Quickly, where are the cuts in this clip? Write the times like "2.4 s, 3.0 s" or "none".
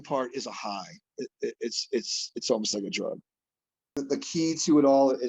3.9 s